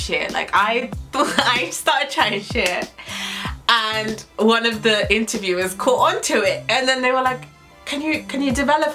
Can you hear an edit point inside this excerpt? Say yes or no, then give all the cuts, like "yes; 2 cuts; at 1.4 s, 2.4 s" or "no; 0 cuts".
no; 0 cuts